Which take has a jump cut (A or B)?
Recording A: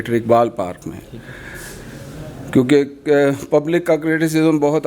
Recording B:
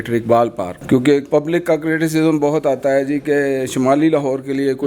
B